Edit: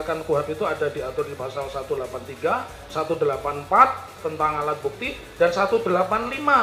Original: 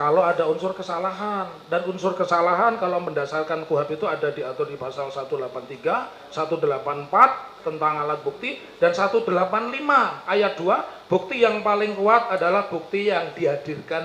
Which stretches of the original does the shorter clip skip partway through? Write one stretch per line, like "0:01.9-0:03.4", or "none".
none